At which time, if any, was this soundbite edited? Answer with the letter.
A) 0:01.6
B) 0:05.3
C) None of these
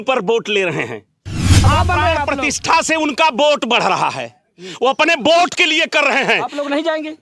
A